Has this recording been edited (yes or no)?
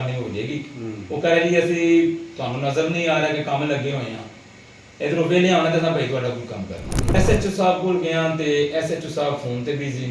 yes